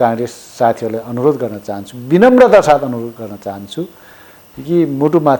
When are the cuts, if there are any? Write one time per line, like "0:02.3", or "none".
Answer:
none

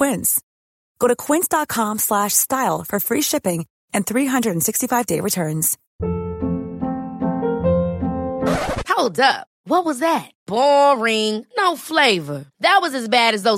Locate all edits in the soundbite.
0:05.8

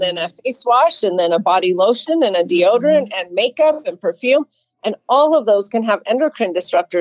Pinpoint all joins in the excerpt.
none

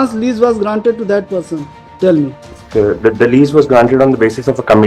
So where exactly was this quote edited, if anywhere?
0:02.6

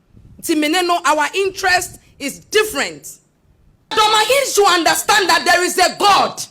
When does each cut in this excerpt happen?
0:03.9

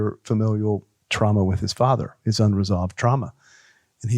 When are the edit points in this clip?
0:01.0

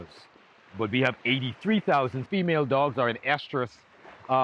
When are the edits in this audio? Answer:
0:02.2

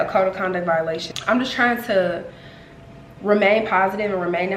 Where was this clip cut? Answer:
0:01.1

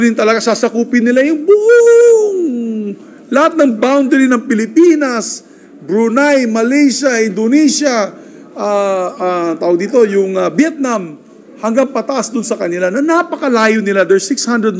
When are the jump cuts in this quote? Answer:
none

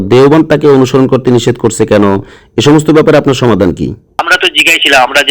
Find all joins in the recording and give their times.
0:04.2

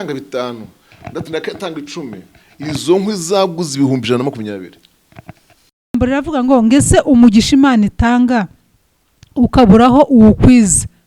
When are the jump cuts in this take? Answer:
0:05.9

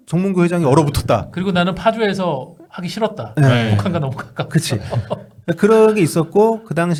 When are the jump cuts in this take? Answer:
none

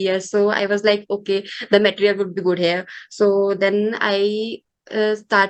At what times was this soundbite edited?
none

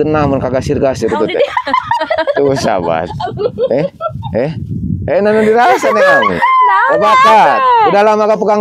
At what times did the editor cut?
none

